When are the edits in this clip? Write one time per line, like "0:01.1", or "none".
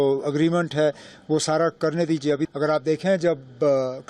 0:02.5